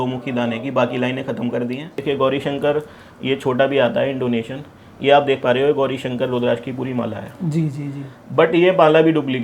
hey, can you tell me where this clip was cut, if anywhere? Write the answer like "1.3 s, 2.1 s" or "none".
2.0 s